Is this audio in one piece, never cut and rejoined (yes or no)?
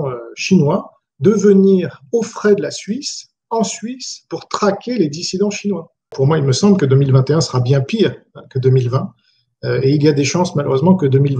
no